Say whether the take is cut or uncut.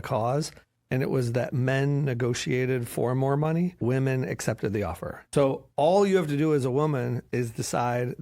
cut